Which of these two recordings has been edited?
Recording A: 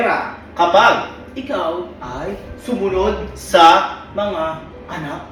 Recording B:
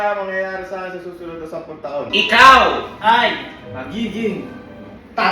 B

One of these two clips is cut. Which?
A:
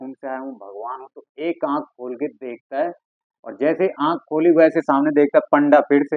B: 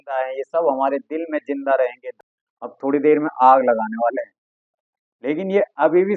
B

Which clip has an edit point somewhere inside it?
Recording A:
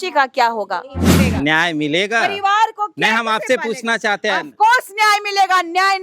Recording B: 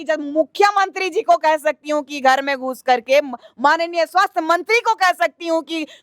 A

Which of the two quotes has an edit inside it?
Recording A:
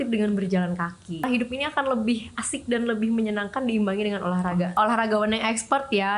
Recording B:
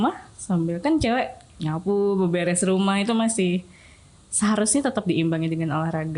A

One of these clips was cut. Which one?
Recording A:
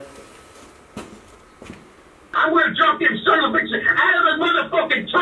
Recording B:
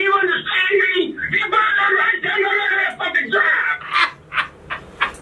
A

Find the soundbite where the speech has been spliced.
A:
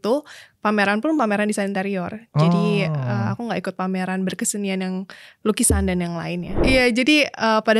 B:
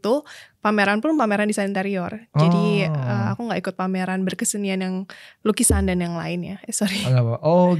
A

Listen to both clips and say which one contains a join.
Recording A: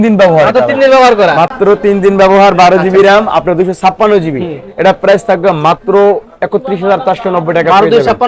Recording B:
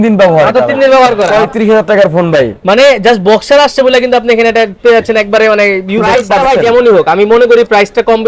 B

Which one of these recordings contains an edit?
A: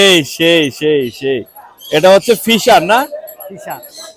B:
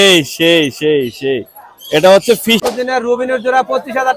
B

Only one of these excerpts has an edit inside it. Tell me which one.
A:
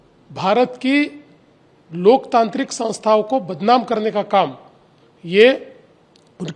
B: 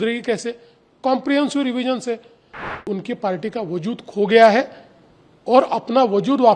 B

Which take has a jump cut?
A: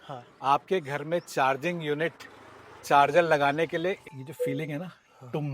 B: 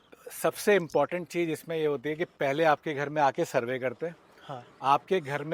A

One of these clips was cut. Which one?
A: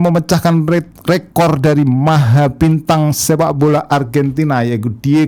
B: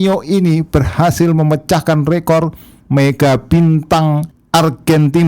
B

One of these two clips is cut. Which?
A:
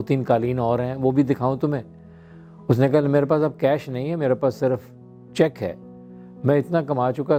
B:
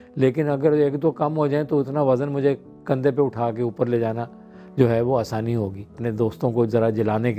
B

